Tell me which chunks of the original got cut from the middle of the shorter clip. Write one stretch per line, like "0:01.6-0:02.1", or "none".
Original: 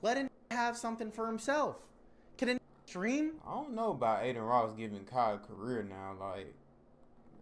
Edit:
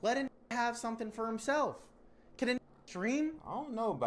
none